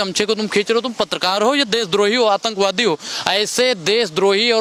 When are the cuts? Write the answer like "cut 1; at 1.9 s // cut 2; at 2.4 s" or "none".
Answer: none